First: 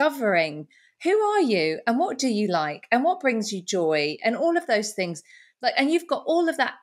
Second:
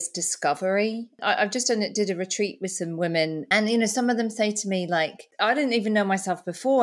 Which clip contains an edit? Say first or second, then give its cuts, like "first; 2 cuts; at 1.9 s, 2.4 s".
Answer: second; 3 cuts; at 1.2 s, 3.4 s, 5.2 s